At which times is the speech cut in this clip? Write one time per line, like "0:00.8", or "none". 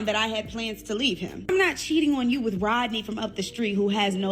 0:01.5